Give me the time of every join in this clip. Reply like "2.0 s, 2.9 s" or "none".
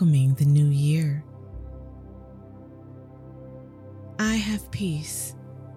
none